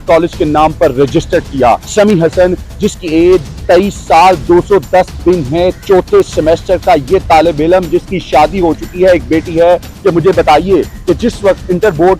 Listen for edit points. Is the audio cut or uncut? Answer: cut